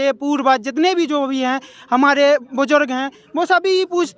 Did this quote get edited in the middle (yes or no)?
no